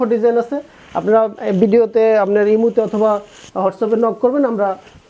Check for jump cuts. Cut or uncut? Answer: uncut